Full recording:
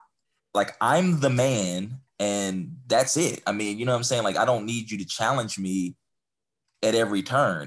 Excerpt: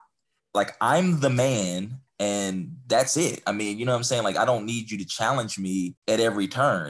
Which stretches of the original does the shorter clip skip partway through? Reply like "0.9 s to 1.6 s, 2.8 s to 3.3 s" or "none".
6.0 s to 6.7 s